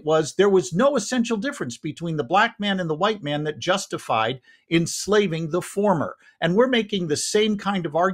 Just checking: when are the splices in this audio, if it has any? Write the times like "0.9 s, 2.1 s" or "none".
none